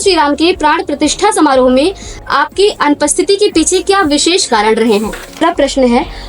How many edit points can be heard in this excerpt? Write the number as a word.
one